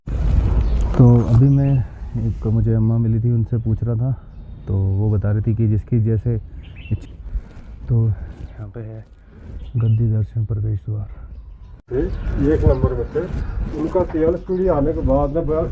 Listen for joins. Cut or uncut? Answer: cut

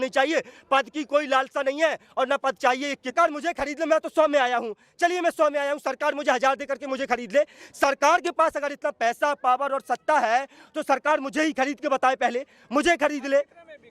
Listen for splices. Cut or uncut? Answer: cut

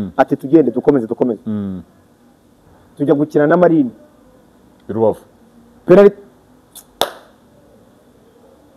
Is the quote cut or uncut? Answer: uncut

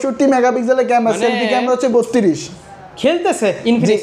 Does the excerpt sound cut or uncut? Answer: uncut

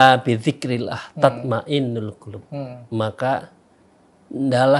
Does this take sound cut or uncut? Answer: uncut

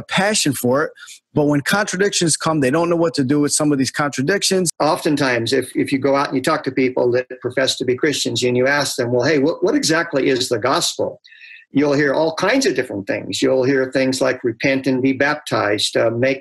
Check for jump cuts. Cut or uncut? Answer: cut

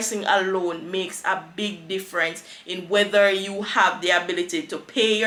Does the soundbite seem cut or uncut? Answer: uncut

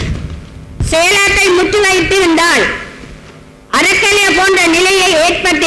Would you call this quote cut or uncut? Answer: uncut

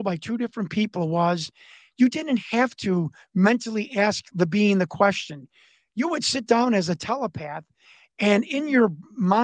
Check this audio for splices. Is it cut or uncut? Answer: uncut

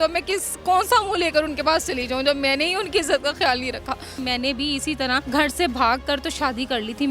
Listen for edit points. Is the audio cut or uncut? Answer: cut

